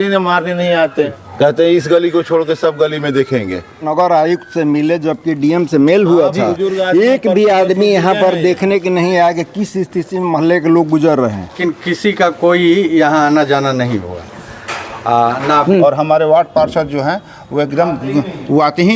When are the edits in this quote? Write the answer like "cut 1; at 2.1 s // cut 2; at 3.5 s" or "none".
cut 1; at 1.1 s // cut 2; at 3.9 s // cut 3; at 11.6 s // cut 4; at 15.6 s